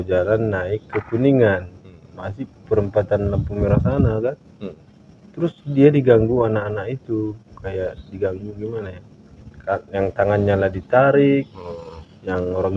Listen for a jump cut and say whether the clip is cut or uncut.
uncut